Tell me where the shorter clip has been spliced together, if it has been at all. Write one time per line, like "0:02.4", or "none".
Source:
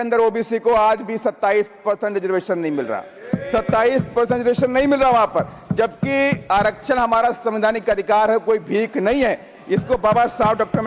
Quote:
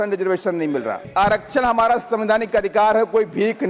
0:01.1